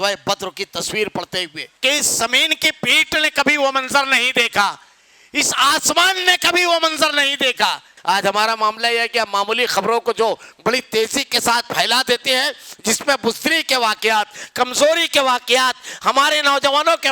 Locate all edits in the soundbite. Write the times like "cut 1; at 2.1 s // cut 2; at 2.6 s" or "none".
cut 1; at 1.6 s // cut 2; at 7.9 s